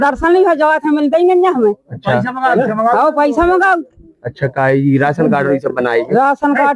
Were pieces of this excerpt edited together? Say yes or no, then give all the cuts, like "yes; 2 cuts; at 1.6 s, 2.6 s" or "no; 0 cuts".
no; 0 cuts